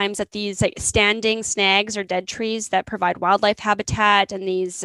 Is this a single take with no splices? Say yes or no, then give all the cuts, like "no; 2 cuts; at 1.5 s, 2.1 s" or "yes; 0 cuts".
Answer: yes; 0 cuts